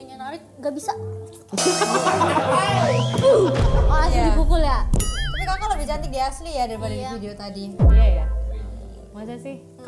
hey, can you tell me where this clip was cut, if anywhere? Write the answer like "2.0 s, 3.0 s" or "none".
none